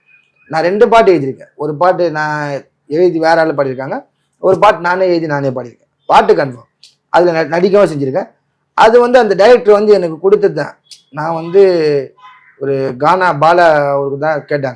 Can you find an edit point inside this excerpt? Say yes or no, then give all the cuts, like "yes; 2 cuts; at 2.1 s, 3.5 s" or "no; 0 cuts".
no; 0 cuts